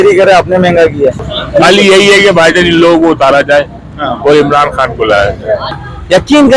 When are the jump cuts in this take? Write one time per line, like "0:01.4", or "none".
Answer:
0:01.3
0:05.8